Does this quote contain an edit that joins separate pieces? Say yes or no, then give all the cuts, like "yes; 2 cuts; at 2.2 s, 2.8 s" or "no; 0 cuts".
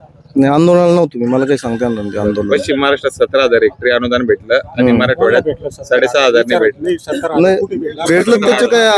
no; 0 cuts